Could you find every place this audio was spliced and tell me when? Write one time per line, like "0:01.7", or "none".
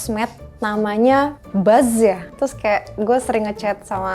0:01.4